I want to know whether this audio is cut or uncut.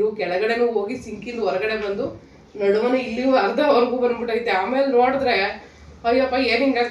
uncut